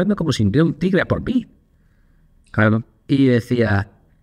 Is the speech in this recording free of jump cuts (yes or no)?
yes